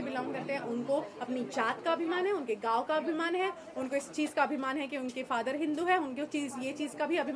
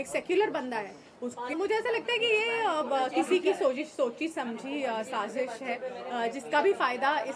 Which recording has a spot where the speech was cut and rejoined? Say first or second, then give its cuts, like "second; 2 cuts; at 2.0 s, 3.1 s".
second; 1 cut; at 1.5 s